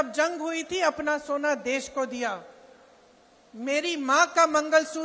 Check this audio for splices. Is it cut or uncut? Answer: uncut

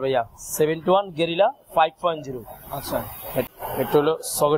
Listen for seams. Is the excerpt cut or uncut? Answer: cut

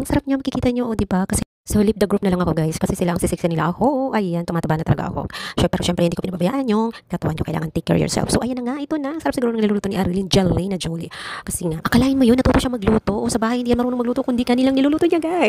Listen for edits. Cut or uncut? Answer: cut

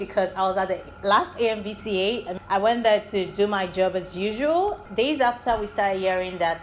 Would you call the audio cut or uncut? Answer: cut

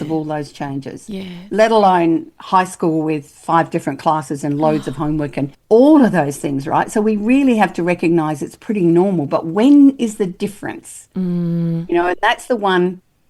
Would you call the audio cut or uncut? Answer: cut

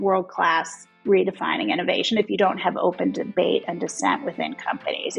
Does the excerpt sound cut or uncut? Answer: uncut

